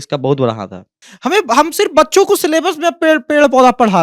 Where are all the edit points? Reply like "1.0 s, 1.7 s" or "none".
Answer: 0.9 s